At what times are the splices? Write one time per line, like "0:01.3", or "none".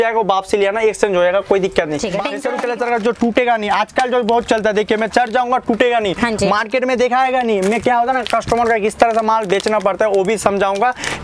0:02.4